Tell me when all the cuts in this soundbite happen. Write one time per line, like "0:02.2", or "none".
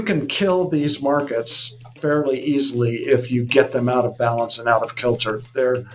none